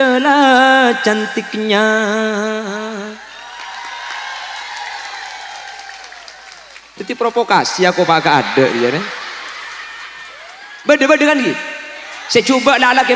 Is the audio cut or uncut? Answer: cut